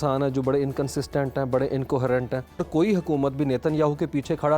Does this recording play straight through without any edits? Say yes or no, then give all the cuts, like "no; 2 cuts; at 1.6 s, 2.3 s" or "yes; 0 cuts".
no; 1 cut; at 2.6 s